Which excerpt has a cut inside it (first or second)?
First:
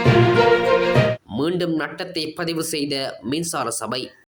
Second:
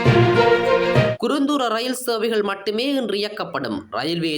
second